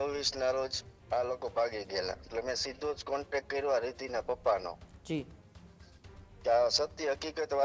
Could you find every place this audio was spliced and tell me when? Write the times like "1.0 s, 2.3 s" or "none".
2.3 s